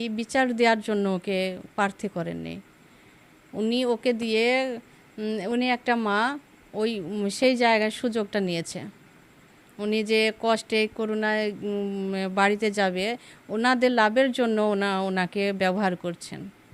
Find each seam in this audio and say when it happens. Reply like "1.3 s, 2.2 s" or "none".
none